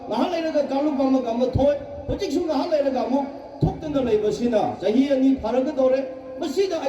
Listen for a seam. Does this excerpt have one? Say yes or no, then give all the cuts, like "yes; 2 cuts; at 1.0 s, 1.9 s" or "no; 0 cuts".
no; 0 cuts